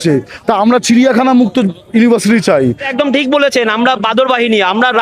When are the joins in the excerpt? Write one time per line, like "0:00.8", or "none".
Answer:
0:02.9